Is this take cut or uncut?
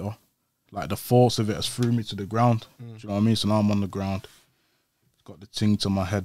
uncut